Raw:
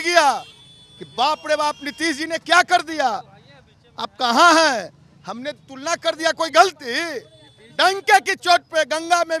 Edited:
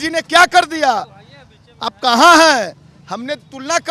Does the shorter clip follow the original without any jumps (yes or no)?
yes